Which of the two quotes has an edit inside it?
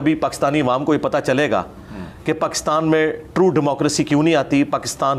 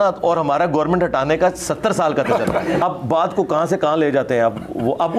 second; 1 cut; at 2.8 s

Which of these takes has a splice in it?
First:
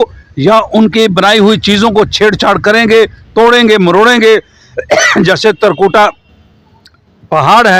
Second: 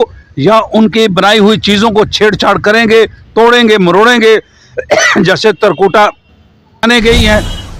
second; 1 cut; at 6.8 s

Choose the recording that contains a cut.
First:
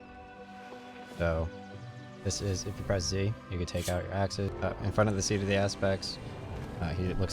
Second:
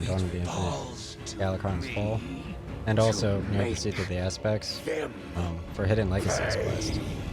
first; 1 cut; at 4.5 s

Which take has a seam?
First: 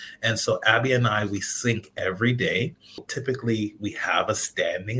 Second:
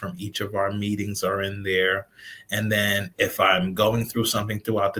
first; 1 cut; at 3.1 s

